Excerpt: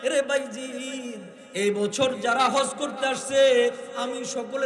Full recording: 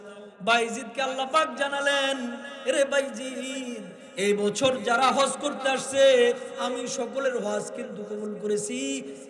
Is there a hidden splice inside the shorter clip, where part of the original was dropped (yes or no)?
no